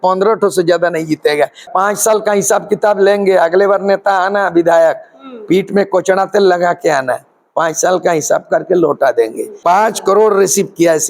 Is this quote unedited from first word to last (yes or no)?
no